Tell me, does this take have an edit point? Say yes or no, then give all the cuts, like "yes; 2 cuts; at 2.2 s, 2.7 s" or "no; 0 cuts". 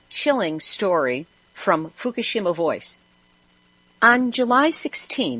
yes; 1 cut; at 1.2 s